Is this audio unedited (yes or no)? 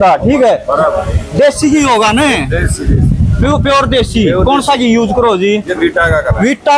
yes